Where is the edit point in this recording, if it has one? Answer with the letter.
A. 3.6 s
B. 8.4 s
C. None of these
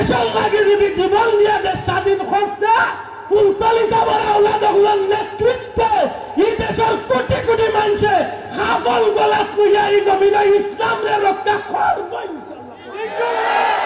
C